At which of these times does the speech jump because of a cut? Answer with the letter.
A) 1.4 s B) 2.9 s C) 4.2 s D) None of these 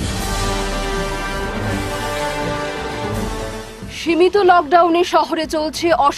D